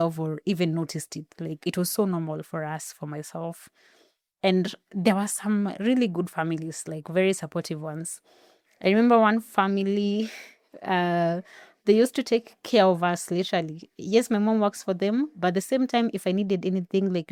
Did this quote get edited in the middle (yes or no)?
no